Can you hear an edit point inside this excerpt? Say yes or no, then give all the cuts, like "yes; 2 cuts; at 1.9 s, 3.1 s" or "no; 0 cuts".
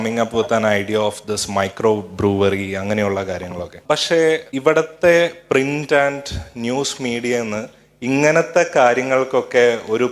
yes; 2 cuts; at 3.7 s, 4.5 s